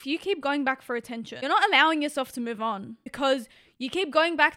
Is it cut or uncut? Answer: cut